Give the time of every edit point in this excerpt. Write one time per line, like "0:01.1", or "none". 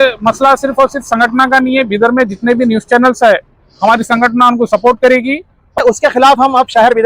0:05.8